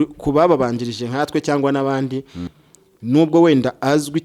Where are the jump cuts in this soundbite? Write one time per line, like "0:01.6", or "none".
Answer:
0:02.5